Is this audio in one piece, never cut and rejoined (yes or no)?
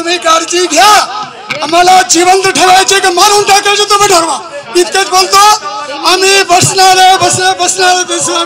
yes